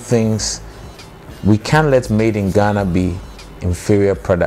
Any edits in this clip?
no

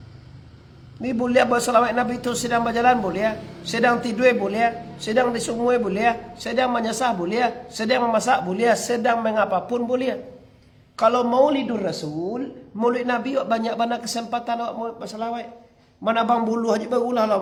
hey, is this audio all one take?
yes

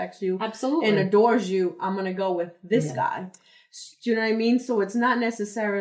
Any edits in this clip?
no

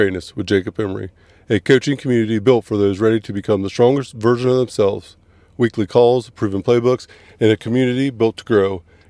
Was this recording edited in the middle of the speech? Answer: no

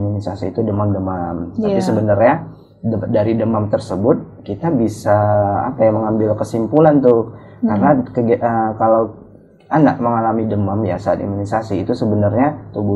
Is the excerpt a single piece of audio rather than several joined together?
yes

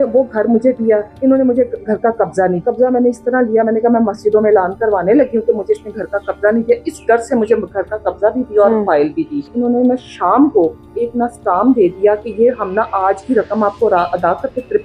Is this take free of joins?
no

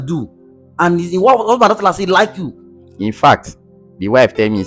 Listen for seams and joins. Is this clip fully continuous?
yes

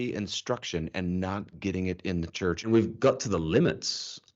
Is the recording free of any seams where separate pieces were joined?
no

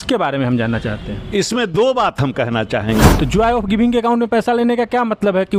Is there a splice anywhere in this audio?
yes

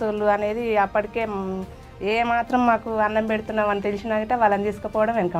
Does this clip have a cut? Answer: no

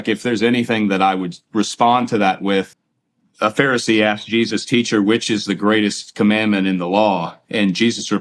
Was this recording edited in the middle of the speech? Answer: yes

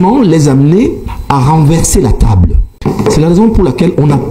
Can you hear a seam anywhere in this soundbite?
yes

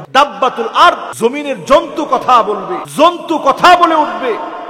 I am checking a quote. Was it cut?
yes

